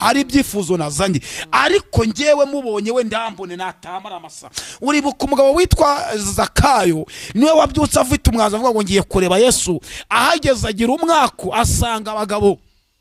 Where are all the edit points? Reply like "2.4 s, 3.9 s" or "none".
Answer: none